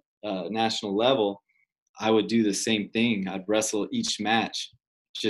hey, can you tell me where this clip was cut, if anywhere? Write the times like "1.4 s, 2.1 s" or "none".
none